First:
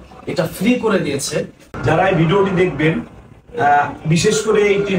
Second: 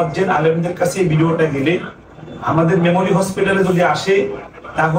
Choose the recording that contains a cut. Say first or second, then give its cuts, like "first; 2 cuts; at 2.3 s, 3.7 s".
first; 1 cut; at 1.7 s